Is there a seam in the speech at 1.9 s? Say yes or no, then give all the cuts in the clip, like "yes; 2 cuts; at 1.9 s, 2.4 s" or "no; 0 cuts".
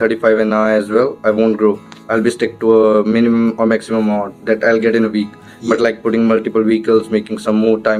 no; 0 cuts